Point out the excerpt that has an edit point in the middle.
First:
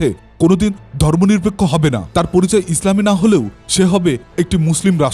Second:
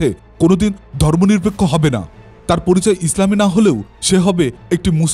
first; 1 cut; at 2.0 s

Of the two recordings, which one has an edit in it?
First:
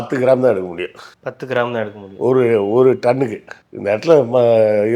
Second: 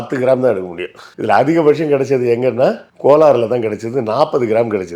second; 1 cut; at 1.1 s

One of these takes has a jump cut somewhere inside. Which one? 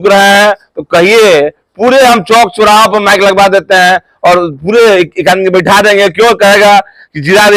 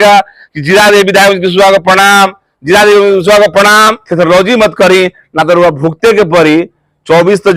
second; 1 cut; at 4.0 s

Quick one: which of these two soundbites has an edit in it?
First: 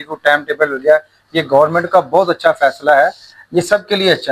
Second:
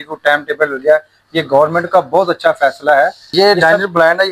second; 1 cut; at 3.2 s

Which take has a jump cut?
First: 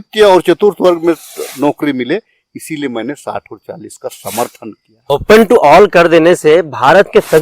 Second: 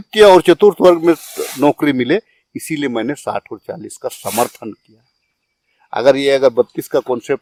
first; 1 cut; at 5.1 s

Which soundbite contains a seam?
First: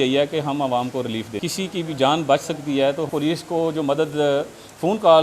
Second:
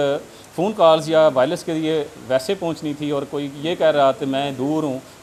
first; 2 cuts; at 1.4 s, 3.1 s

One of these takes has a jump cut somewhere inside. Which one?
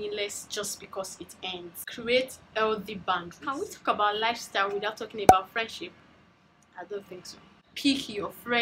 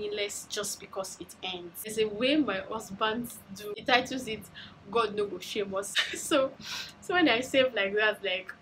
second; 3 cuts; at 1.9 s, 3.8 s, 5.9 s

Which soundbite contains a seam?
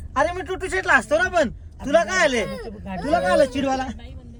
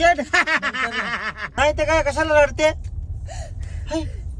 second; 1 cut; at 1.5 s

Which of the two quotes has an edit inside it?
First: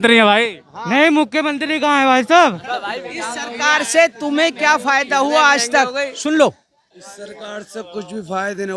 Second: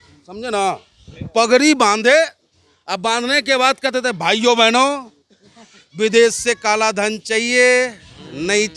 first; 1 cut; at 2.6 s

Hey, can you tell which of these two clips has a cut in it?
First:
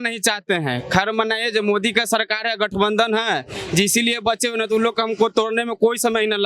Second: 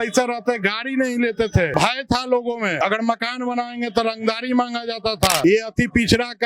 second; 3 cuts; at 1.7 s, 2.8 s, 5.4 s

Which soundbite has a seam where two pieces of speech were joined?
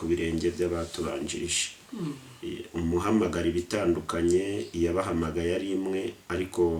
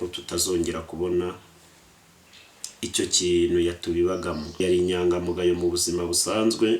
second; 1 cut; at 4.6 s

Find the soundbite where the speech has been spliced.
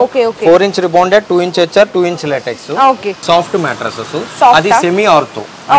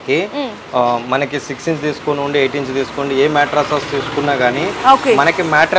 first; 1 cut; at 3.2 s

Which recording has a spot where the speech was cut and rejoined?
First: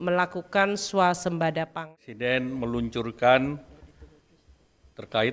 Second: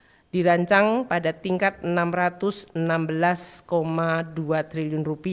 first; 1 cut; at 1.9 s

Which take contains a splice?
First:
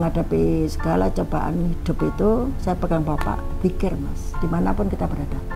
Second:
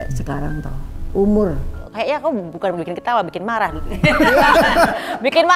second; 1 cut; at 1.8 s

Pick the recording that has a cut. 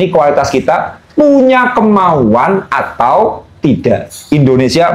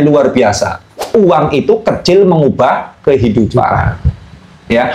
second; 1 cut; at 1.0 s

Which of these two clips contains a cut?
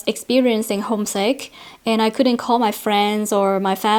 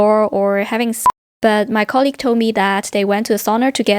second; 1 cut; at 1.1 s

